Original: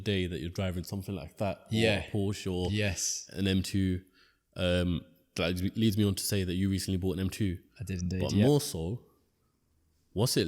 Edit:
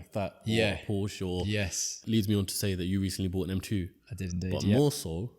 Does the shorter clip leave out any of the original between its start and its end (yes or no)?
yes